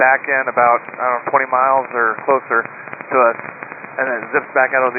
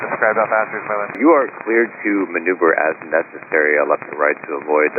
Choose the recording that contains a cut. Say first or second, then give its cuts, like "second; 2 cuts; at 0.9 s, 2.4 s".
second; 1 cut; at 1.2 s